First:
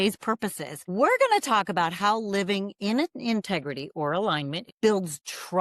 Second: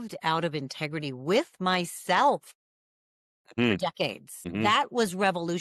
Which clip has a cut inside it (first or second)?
first